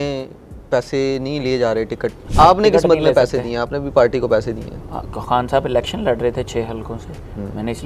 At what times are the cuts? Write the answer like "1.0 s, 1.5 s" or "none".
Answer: 2.2 s